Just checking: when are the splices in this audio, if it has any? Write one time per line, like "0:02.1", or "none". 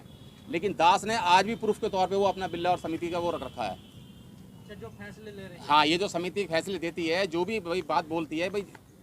0:04.6